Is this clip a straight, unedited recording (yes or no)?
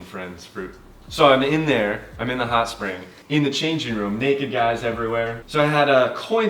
no